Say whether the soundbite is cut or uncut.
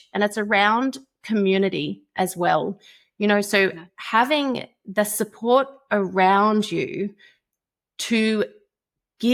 uncut